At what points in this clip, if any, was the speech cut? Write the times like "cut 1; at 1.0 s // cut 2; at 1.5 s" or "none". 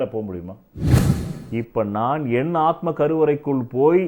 cut 1; at 1.1 s

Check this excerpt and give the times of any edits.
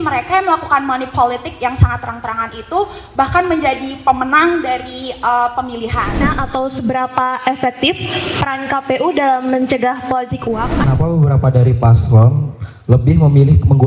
cut 1; at 6.3 s // cut 2; at 10.8 s

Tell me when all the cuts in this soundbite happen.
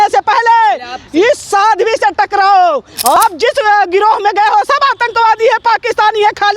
cut 1; at 3.2 s

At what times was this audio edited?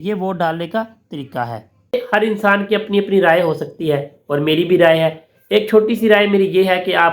cut 1; at 1.9 s

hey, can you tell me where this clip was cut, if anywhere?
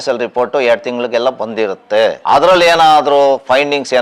cut 1; at 2.2 s

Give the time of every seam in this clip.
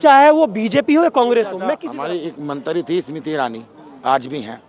cut 1; at 1.8 s

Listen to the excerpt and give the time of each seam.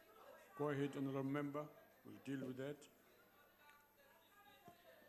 cut 1; at 1.9 s

